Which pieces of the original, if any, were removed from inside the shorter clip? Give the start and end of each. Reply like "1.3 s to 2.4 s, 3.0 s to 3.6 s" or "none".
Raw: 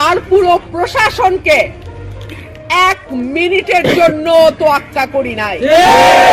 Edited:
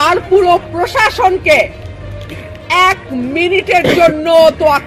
none